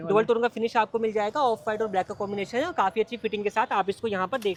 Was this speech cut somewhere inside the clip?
no; 0 cuts

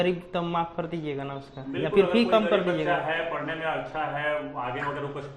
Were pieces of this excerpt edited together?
no; 0 cuts

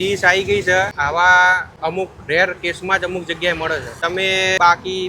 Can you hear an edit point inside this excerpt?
yes; 3 cuts; at 0.9 s, 1.7 s, 4.1 s

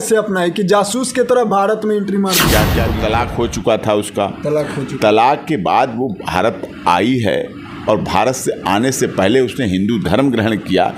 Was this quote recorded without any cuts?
no; 1 cut; at 2.9 s

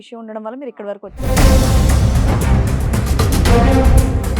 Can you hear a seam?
yes; 1 cut; at 1.2 s

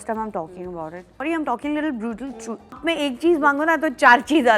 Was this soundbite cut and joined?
yes; 2 cuts; at 1.2 s, 2.8 s

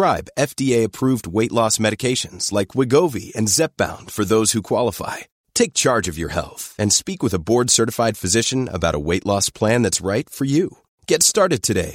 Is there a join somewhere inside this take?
no; 0 cuts

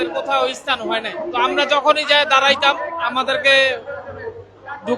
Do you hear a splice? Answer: yes; 1 cut; at 1.2 s

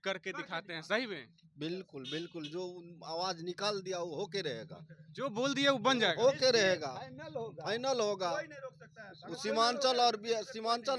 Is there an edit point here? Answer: no; 0 cuts

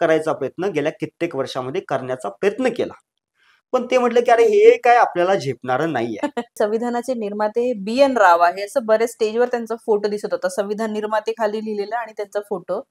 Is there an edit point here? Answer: yes; 1 cut; at 6.5 s

